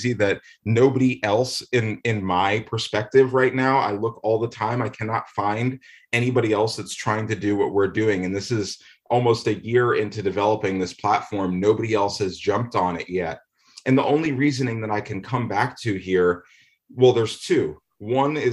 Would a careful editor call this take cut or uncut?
uncut